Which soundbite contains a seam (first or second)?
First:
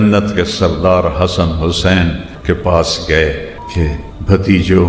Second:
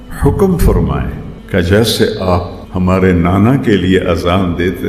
first